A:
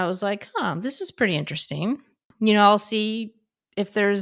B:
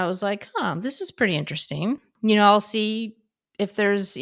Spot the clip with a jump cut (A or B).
B